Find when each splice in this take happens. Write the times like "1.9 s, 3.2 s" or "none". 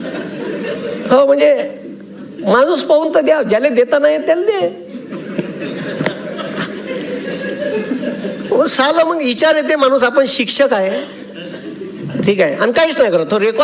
none